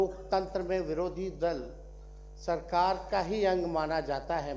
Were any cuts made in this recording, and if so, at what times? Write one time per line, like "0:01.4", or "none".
none